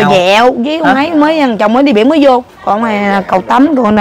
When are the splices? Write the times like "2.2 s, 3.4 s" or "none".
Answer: 2.5 s